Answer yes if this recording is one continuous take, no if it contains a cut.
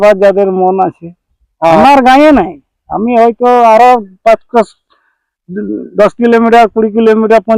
yes